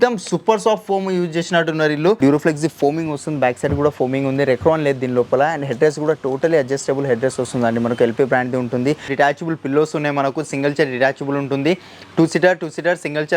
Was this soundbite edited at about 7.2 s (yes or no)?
no